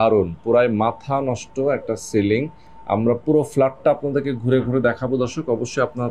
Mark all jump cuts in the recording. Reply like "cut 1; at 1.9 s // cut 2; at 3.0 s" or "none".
none